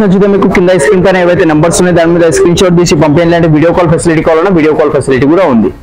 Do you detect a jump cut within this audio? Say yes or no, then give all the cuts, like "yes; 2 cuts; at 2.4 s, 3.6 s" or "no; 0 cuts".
no; 0 cuts